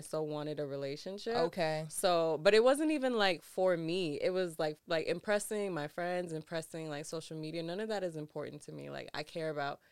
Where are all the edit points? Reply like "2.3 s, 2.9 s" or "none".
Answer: 4.8 s